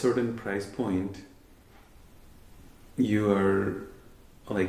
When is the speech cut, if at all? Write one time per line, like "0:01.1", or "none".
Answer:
none

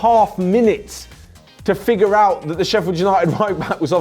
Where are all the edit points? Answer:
none

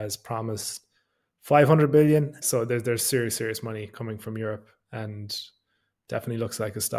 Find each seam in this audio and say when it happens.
0:02.4

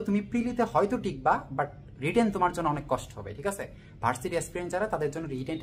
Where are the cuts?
none

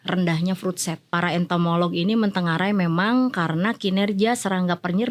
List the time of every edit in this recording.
0:01.0

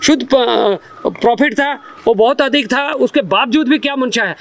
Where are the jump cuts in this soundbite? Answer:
none

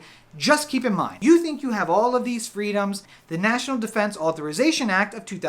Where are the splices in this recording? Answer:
0:01.1
0:03.1

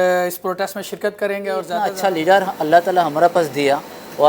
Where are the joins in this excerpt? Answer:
0:01.9

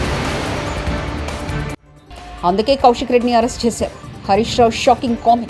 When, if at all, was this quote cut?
0:01.8

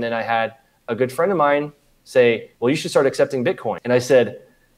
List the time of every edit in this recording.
0:02.5
0:03.8

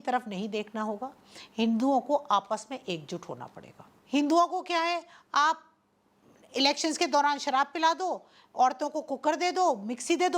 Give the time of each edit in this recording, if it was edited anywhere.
0:03.9

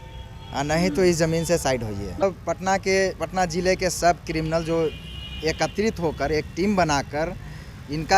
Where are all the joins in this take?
0:02.2

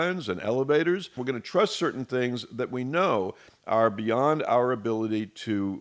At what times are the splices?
0:01.2

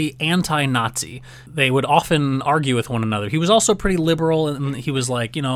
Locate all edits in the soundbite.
none

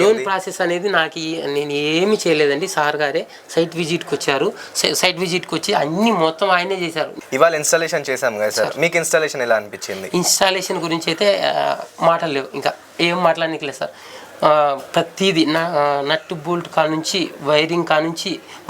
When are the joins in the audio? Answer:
0:07.1

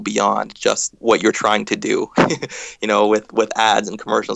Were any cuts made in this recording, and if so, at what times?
0:01.0

